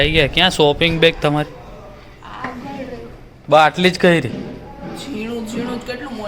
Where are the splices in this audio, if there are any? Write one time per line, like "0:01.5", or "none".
none